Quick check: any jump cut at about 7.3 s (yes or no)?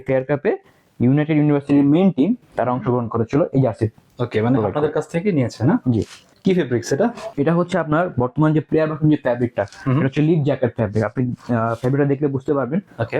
yes